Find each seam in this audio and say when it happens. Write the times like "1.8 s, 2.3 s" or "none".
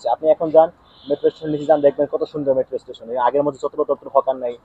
none